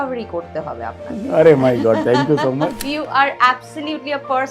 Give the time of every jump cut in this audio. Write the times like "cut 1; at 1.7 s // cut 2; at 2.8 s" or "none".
cut 1; at 2.8 s